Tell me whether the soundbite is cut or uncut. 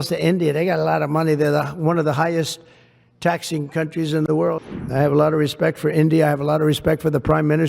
cut